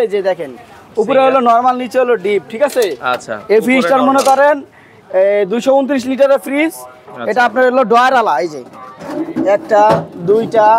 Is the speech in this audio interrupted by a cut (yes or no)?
no